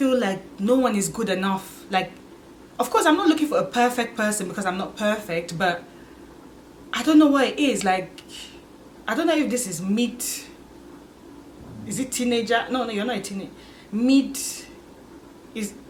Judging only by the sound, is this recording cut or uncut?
uncut